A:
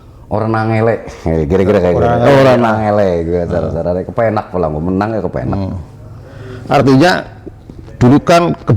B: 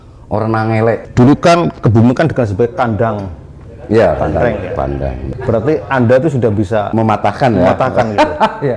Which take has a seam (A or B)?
B